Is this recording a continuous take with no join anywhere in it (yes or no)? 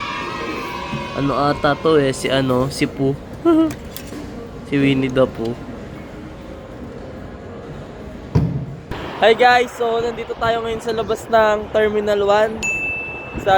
no